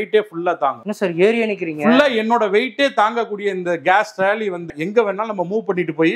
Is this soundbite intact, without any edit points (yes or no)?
no